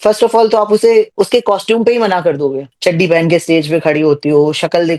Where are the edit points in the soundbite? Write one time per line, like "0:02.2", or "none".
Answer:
0:01.1
0:02.7